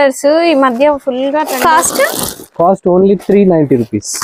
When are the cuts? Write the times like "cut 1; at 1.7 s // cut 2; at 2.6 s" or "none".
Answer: cut 1; at 1.5 s